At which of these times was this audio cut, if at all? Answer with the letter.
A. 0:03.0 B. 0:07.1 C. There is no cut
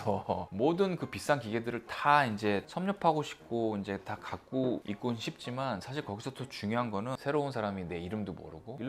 B